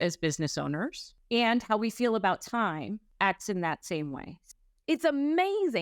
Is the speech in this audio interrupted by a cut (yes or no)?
yes